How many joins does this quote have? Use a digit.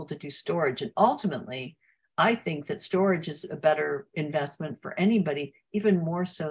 0